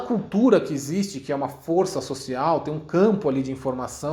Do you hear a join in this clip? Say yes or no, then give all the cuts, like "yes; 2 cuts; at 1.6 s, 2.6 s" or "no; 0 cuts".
no; 0 cuts